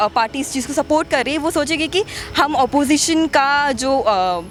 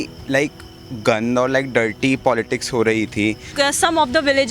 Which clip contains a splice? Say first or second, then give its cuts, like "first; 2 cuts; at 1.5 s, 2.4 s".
second; 1 cut; at 3.5 s